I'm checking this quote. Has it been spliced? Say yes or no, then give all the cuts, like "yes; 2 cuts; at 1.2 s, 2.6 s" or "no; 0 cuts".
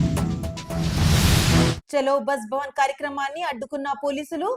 yes; 1 cut; at 1.8 s